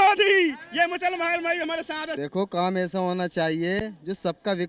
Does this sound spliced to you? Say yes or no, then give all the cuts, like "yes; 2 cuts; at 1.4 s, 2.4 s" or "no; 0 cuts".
yes; 1 cut; at 2.2 s